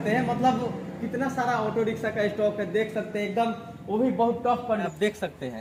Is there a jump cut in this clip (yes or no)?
no